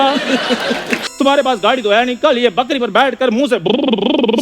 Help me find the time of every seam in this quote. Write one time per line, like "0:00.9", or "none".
0:00.9